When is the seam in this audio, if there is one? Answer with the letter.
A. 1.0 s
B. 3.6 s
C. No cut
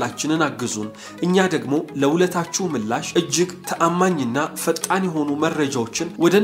C